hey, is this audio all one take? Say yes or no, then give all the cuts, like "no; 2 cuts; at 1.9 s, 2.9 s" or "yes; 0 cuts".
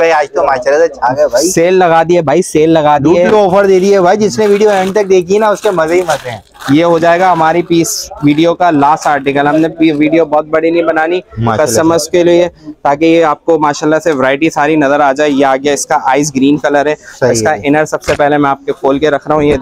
yes; 0 cuts